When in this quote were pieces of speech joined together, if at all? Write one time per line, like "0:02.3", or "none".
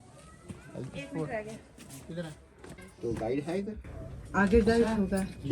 0:02.8